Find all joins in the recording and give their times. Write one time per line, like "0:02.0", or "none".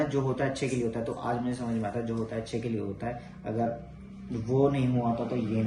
none